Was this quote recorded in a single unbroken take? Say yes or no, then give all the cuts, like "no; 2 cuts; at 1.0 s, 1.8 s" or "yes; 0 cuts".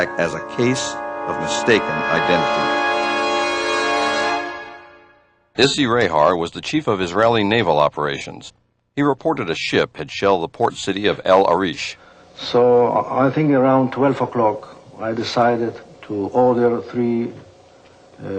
yes; 0 cuts